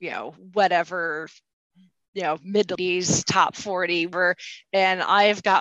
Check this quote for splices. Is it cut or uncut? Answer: cut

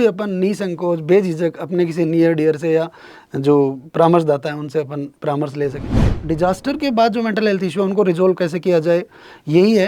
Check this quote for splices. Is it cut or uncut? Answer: cut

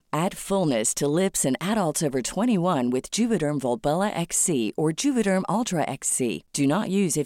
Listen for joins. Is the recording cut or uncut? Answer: uncut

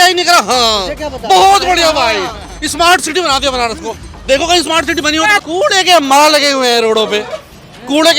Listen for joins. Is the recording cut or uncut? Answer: cut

